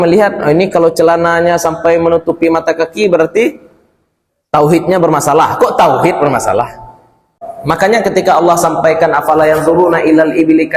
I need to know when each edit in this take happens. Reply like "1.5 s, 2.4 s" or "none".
7.5 s